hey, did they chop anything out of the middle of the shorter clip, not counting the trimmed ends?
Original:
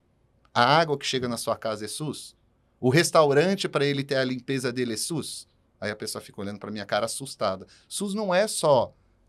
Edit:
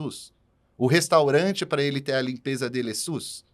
no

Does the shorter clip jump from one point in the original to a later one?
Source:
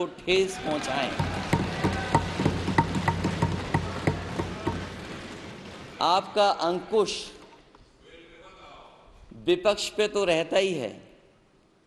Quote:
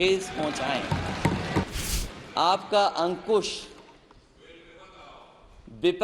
yes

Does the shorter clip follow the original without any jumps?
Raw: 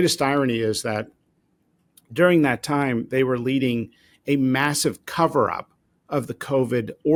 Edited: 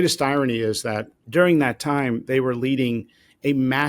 no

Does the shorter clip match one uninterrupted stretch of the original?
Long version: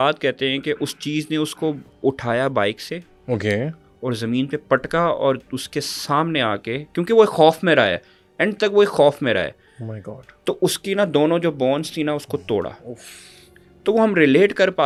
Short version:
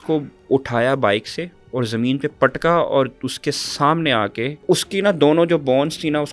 no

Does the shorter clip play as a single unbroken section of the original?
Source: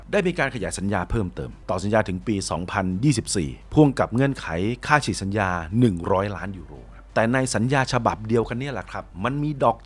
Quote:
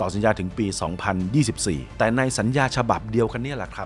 no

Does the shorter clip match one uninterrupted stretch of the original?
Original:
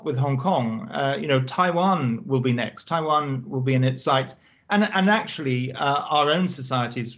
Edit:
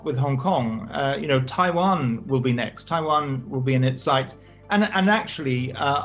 yes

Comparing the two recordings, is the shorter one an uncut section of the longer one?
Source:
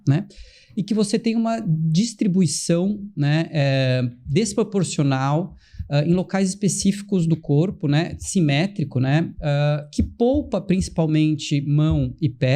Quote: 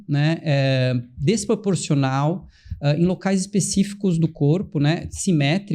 yes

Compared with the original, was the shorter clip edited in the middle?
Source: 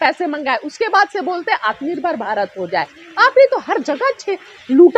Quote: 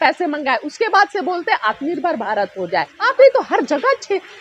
yes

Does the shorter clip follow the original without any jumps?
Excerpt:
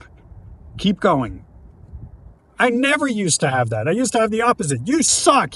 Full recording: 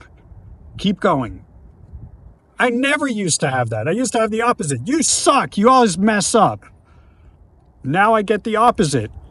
yes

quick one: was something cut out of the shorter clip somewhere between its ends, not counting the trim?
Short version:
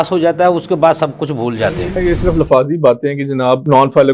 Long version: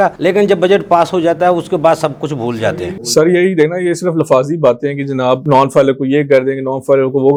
yes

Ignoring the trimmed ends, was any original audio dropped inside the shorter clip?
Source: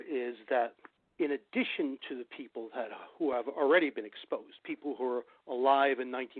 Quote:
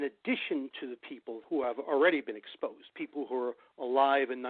yes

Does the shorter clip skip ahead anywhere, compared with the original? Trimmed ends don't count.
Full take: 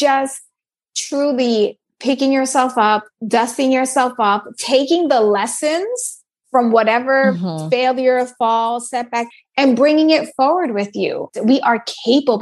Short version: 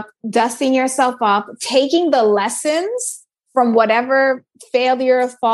no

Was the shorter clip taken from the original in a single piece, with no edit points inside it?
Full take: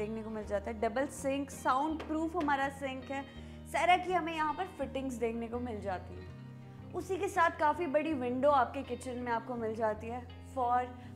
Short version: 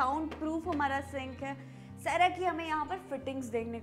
yes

